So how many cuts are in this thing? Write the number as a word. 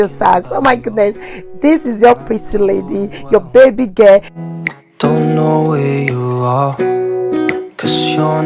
one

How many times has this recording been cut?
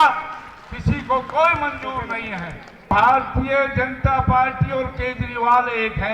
one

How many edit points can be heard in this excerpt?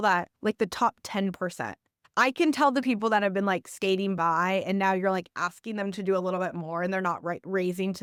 zero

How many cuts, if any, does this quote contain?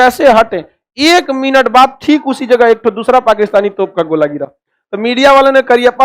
one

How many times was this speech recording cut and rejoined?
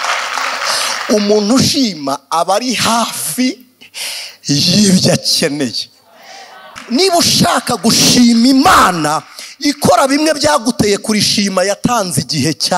one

